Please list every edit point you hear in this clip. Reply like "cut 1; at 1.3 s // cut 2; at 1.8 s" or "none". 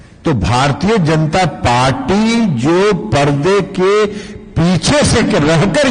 none